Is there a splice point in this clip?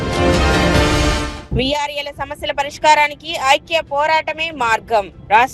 yes; 1 cut; at 1.3 s

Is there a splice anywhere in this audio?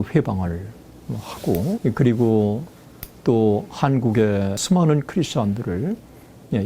yes; 2 cuts; at 1.8 s, 4.6 s

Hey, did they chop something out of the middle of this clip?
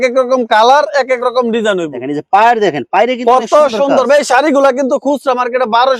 no; 0 cuts

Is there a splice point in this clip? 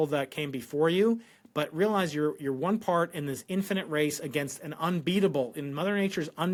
no; 0 cuts

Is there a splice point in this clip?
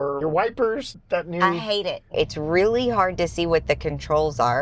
yes; 2 cuts; at 0.9 s, 2.1 s

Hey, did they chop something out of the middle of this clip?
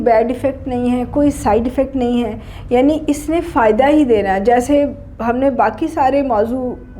no; 0 cuts

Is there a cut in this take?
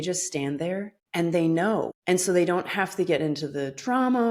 yes; 2 cuts; at 1.0 s, 1.9 s

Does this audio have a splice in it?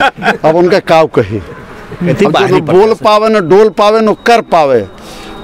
yes; 1 cut; at 2.1 s

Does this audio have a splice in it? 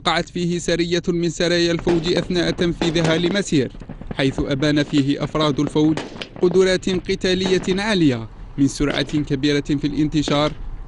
no; 0 cuts

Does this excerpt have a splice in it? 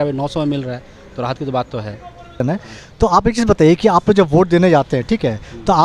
yes; 1 cut; at 2.4 s

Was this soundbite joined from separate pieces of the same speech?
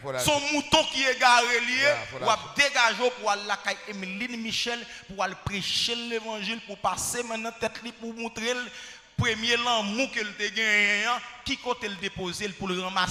no; 0 cuts

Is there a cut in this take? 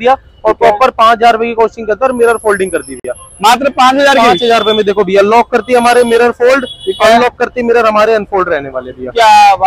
no; 0 cuts

